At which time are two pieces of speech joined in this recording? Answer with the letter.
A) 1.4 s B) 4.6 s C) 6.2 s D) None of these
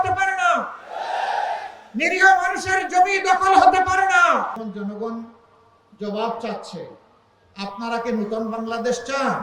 B